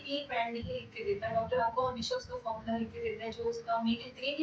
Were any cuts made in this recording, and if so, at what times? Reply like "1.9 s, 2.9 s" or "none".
none